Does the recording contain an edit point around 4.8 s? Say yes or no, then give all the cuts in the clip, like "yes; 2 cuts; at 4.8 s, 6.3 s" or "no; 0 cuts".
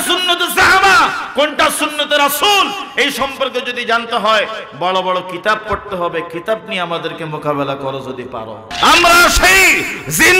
no; 1 cut; at 8.6 s